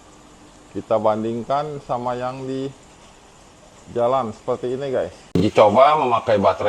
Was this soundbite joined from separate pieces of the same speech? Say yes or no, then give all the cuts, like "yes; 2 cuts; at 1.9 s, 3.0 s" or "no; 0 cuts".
yes; 1 cut; at 5.4 s